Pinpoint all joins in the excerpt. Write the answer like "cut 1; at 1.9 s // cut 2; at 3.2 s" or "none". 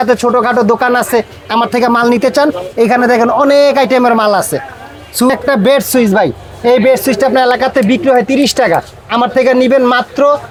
none

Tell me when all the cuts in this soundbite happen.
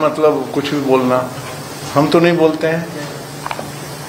none

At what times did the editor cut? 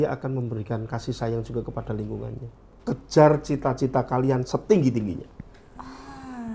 cut 1; at 2.6 s

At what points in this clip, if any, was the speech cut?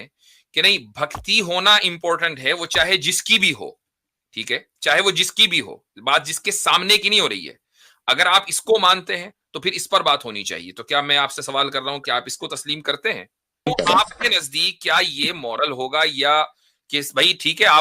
cut 1; at 13.7 s

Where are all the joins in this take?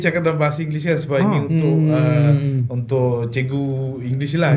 none

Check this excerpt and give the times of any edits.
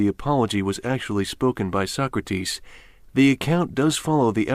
cut 1; at 1.5 s

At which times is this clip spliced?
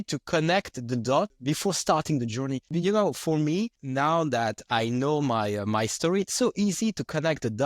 cut 1; at 1.4 s // cut 2; at 2.7 s // cut 3; at 3.8 s

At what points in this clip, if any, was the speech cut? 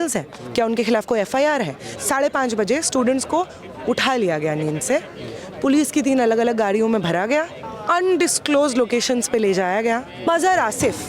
cut 1; at 1.8 s // cut 2; at 7.7 s // cut 3; at 10.3 s

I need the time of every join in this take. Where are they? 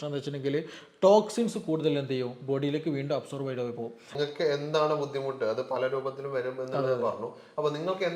cut 1; at 4.1 s

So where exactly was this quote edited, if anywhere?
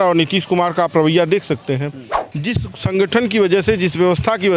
cut 1; at 2.2 s

